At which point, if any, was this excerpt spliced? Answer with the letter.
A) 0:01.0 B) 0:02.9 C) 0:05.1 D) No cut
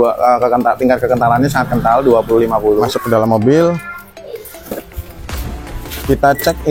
B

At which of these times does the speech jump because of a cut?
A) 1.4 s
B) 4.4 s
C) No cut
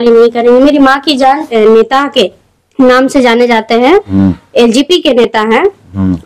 A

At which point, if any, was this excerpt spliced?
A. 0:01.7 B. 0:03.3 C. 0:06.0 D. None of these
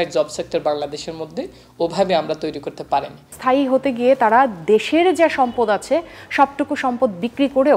B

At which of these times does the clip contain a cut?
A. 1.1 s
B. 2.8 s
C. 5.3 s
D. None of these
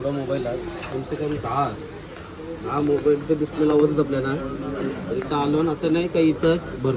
D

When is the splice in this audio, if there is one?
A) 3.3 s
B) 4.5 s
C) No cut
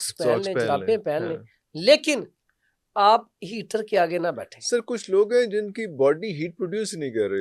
C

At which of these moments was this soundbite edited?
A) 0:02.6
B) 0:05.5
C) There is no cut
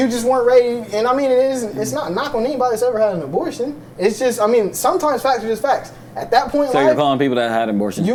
C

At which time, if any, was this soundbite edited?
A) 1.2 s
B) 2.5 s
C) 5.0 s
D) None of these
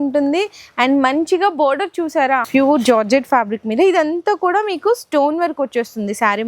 B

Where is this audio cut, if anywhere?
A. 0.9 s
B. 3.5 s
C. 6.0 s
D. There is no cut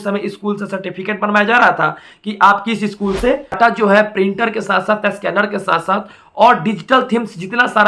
B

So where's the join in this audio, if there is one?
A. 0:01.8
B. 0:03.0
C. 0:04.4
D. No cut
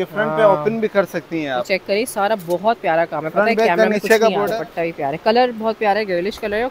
C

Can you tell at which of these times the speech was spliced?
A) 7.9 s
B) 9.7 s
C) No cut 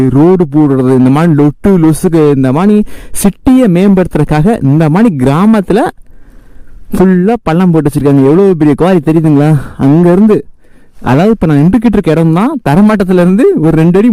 C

